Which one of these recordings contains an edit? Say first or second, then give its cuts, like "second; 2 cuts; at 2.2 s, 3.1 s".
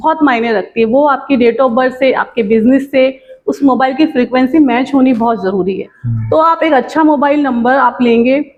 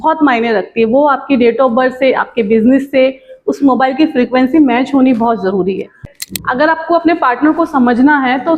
second; 1 cut; at 6.1 s